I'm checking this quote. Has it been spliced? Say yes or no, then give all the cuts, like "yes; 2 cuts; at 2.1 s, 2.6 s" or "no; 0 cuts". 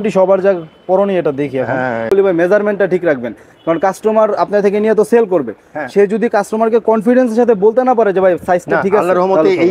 yes; 1 cut; at 2.1 s